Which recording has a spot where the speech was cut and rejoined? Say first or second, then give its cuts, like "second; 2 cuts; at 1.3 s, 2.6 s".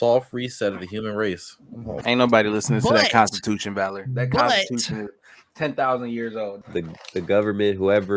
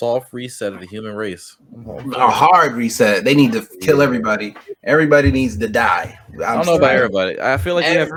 first; 2 cuts; at 1.9 s, 6.6 s